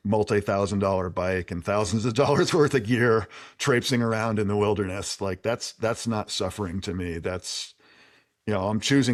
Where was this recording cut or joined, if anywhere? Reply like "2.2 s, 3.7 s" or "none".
none